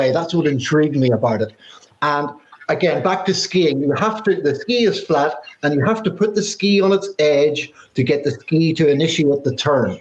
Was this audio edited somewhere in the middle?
yes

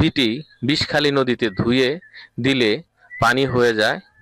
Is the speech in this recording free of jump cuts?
yes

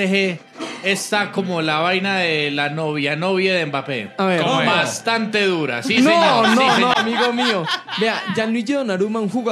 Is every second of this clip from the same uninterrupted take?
yes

